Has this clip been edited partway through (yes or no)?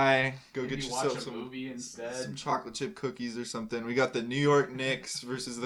no